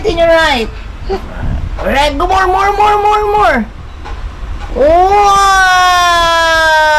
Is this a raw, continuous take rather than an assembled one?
yes; 0 cuts

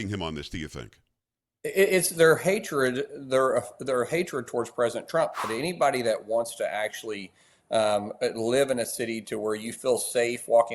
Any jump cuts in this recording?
yes; 1 cut; at 5.4 s

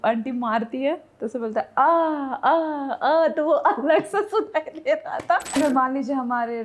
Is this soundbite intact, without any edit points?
no; 1 cut; at 5.6 s

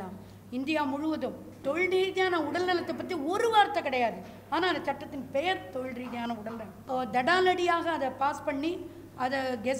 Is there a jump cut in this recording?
yes; 2 cuts; at 1.6 s, 6.7 s

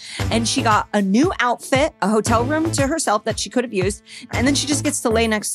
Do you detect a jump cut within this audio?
yes; 1 cut; at 4.3 s

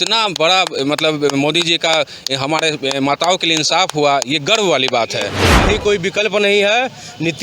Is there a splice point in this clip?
yes; 1 cut; at 5.5 s

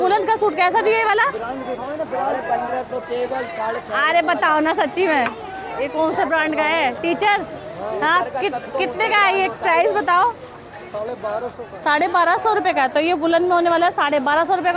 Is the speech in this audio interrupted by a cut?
no; 0 cuts

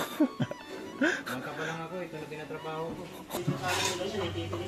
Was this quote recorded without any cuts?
no; 1 cut; at 3.4 s

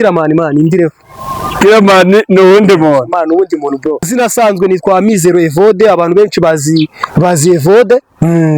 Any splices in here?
yes; 1 cut; at 4.1 s

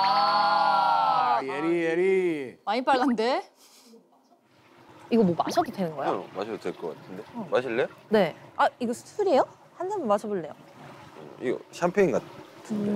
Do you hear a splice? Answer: no; 0 cuts

